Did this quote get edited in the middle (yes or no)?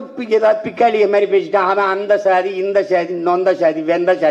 no